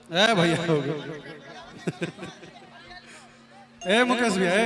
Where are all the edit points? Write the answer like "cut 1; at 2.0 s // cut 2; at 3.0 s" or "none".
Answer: none